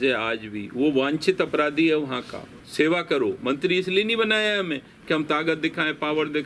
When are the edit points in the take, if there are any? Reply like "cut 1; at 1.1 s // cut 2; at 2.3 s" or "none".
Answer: cut 1; at 2.6 s